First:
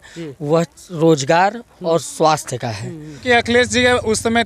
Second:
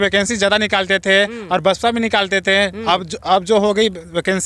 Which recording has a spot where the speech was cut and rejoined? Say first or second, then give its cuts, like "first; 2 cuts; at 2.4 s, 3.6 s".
first; 1 cut; at 3.2 s